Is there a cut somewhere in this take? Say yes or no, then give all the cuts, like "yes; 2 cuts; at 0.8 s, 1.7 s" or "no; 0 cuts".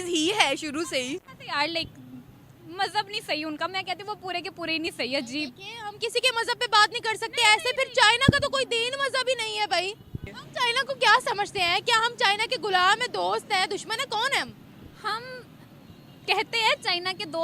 yes; 1 cut; at 10.2 s